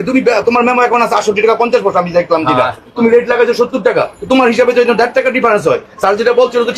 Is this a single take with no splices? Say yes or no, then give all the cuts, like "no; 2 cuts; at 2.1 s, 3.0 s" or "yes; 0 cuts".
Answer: yes; 0 cuts